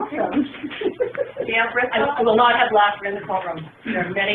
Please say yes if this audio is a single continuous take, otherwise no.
yes